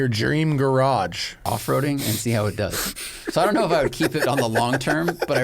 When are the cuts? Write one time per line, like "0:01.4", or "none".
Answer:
0:01.4